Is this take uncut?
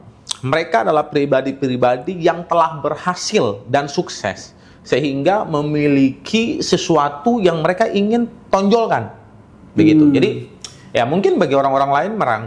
yes; 0 cuts

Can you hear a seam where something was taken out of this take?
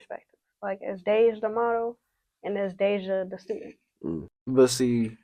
yes; 1 cut; at 4.3 s

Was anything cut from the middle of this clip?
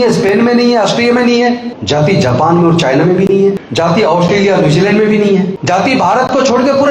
yes; 3 cuts; at 1.7 s, 3.6 s, 5.6 s

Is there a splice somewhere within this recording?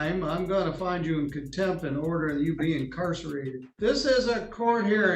yes; 1 cut; at 3.6 s

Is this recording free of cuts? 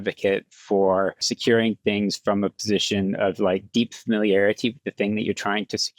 no; 1 cut; at 1.3 s

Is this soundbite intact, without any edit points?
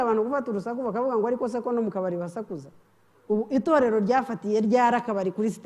yes; 0 cuts

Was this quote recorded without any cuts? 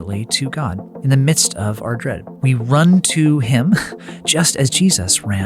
no; 2 cuts; at 0.9 s, 2.3 s

